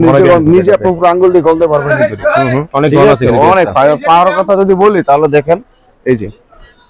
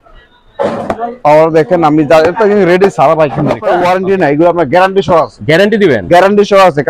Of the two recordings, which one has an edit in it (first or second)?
second